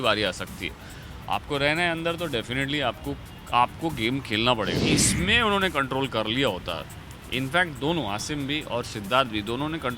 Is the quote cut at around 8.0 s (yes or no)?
no